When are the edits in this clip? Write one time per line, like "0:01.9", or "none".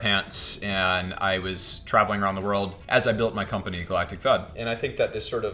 0:02.8
0:04.5